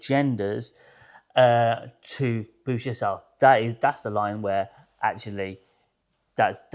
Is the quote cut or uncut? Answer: uncut